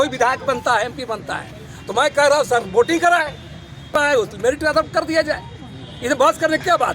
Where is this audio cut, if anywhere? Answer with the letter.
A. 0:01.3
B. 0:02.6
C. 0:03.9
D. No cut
C